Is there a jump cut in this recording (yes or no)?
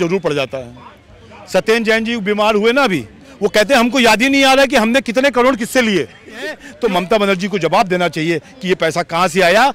yes